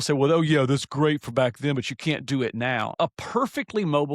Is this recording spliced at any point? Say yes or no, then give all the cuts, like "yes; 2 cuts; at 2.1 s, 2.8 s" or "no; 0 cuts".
yes; 1 cut; at 2.9 s